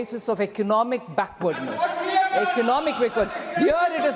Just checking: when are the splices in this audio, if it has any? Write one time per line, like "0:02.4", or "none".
none

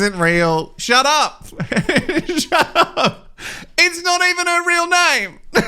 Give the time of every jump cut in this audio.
none

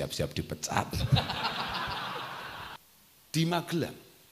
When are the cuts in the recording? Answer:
0:02.8

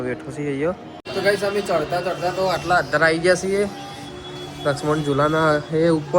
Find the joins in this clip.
0:00.9

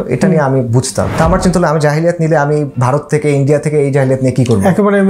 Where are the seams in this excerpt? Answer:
0:01.1
0:02.7

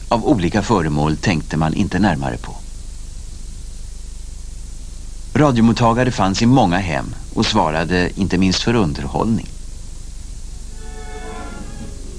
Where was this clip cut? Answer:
0:07.8

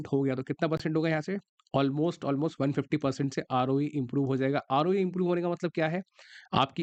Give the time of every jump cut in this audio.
none

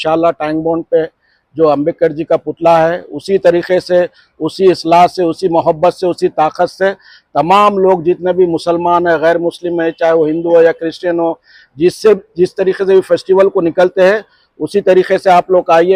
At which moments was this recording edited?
none

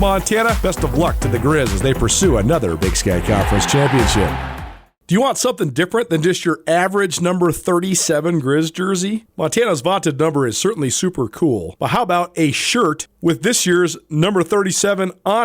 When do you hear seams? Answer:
0:04.5

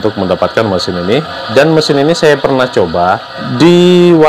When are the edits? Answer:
0:01.4
0:03.4

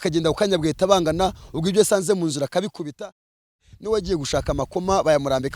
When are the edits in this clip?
0:03.6

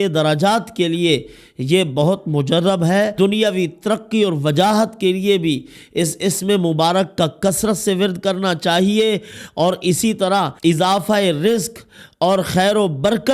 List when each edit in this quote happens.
0:03.1
0:10.5

